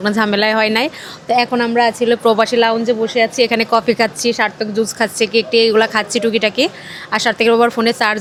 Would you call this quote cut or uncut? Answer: uncut